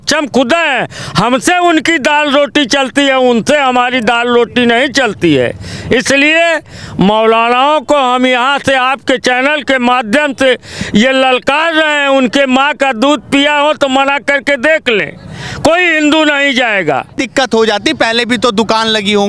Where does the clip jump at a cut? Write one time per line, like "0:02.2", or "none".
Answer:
0:17.2